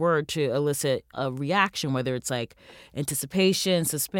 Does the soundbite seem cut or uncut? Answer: cut